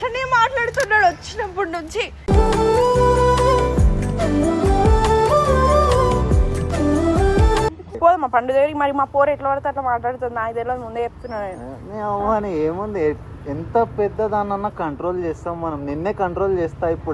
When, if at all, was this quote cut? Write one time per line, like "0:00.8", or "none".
0:07.9

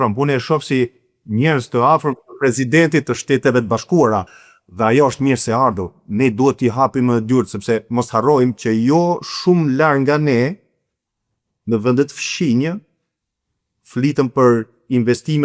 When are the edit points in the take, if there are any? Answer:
none

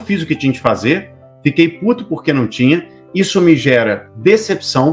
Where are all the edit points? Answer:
none

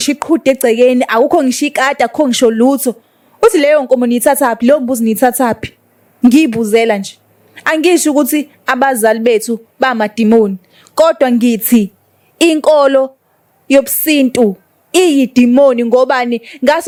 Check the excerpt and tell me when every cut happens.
none

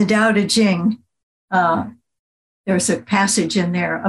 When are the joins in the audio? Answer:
none

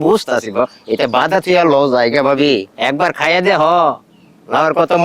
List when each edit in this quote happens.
0:02.7

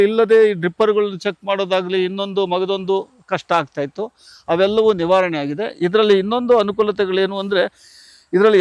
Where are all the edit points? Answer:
none

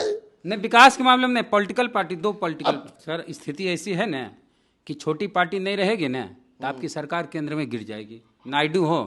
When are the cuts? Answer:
0:02.9

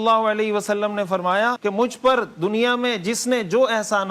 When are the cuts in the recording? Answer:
0:01.6

